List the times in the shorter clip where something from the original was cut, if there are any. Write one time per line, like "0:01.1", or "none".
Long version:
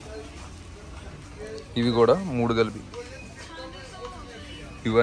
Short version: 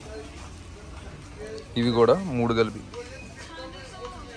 none